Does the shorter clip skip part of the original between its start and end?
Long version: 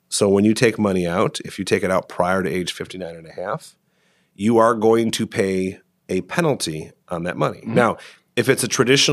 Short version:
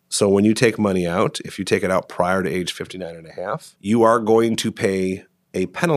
yes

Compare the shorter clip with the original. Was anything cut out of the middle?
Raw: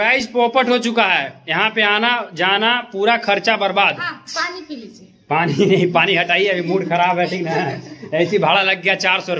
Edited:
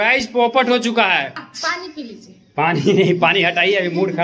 yes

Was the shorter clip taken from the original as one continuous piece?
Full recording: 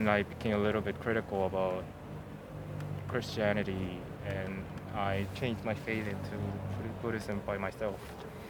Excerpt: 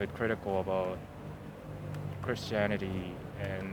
yes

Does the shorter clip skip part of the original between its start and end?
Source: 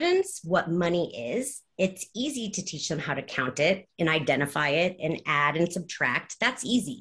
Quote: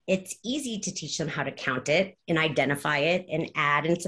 no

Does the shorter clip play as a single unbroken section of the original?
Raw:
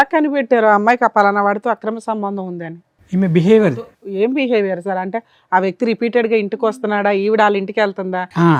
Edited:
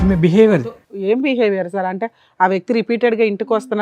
yes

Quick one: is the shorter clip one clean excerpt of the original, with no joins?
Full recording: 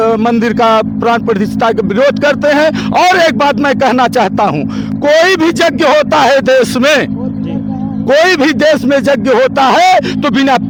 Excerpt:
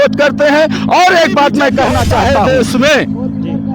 no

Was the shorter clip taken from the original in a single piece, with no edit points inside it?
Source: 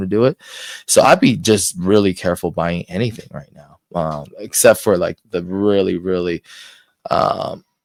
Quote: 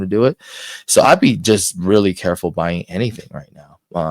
yes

